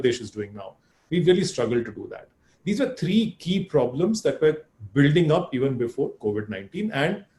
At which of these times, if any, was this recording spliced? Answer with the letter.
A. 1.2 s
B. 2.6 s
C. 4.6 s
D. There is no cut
D